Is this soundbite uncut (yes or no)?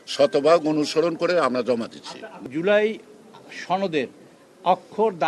no